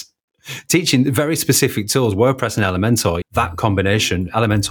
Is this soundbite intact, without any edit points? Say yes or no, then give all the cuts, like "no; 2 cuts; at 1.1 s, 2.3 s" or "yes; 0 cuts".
yes; 0 cuts